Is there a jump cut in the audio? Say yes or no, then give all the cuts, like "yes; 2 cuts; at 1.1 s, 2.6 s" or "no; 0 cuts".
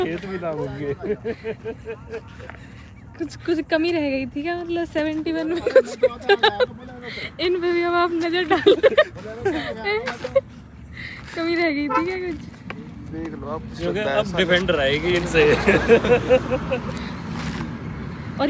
no; 0 cuts